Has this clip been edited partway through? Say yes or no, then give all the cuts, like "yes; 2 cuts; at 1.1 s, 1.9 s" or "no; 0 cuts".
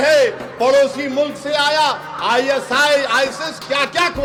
no; 0 cuts